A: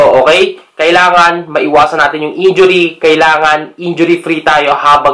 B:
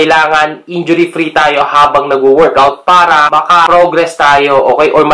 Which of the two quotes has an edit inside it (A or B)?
B